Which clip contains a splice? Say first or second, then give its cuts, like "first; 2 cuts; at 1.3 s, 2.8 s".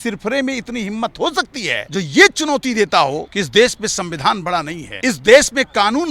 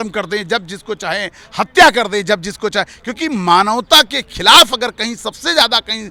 first; 3 cuts; at 1.8 s, 3.3 s, 4.8 s